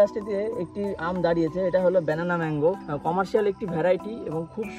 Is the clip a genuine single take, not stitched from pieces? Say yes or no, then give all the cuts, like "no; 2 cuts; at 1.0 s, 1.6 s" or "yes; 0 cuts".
yes; 0 cuts